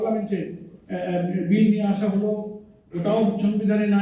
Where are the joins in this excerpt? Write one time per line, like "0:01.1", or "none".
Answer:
none